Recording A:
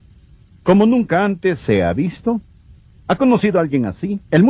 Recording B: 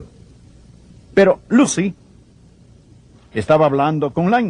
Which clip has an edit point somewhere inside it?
A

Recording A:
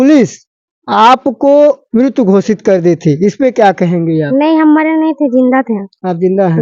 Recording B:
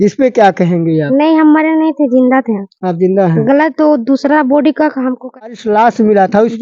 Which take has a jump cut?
B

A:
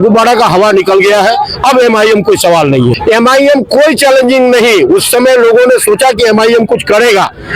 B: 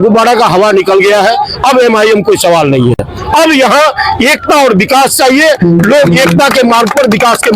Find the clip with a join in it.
A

